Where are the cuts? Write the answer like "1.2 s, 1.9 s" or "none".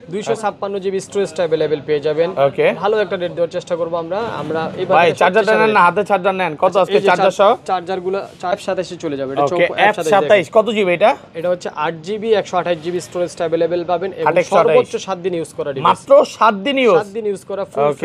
8.5 s